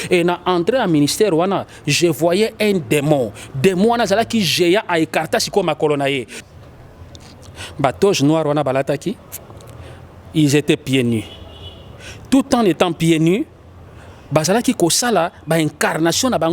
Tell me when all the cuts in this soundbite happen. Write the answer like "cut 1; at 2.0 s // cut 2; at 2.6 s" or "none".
cut 1; at 6.3 s